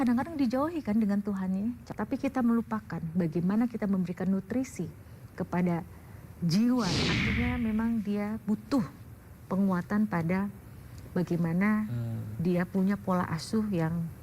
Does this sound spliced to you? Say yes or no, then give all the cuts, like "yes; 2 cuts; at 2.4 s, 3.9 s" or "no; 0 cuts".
yes; 2 cuts; at 1.8 s, 6.9 s